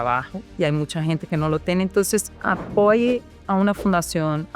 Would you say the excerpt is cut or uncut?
cut